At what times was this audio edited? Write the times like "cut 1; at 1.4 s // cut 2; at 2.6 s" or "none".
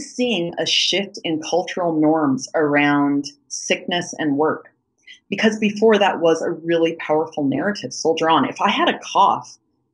none

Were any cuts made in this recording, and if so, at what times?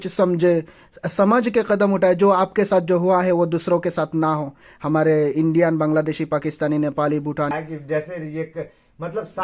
cut 1; at 7.5 s

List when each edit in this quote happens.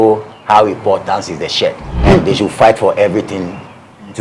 cut 1; at 1.9 s

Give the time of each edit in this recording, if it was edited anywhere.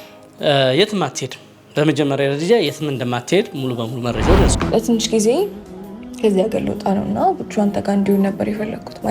cut 1; at 4.5 s

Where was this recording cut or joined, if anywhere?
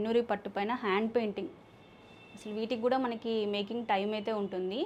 none

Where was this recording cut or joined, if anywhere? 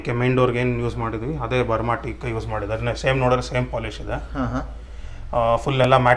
none

